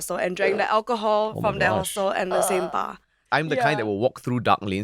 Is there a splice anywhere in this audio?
yes; 1 cut; at 3.2 s

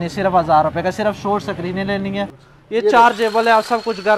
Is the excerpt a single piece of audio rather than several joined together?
no; 1 cut; at 2.3 s

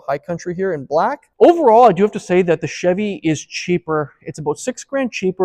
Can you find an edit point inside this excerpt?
yes; 1 cut; at 1.2 s

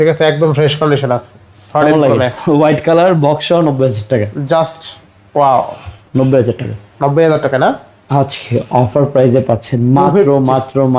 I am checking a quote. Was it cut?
no; 0 cuts

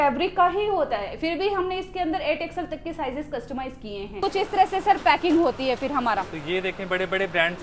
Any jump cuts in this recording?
yes; 1 cut; at 4.2 s

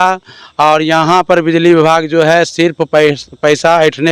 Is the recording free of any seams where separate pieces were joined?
yes; 0 cuts

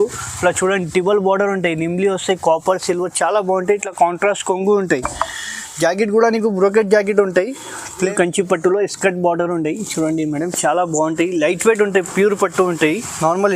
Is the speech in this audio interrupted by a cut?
yes; 1 cut; at 8.1 s

